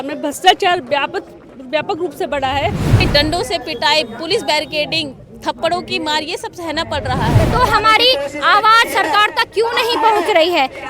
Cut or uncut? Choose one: cut